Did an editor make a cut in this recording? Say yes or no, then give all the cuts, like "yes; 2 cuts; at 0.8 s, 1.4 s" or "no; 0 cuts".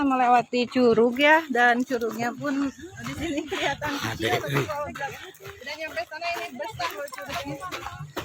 no; 0 cuts